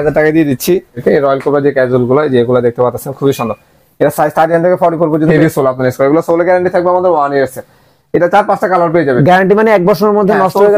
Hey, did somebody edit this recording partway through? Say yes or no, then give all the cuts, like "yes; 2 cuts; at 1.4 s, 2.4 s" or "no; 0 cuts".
yes; 2 cuts; at 1.0 s, 5.3 s